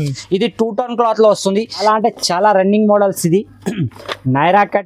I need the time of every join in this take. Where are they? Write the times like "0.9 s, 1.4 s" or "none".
1.7 s

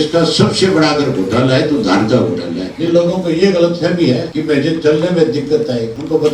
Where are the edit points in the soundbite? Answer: 2.6 s

